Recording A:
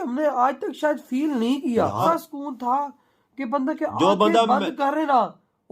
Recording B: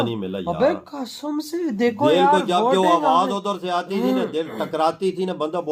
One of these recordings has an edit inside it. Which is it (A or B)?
A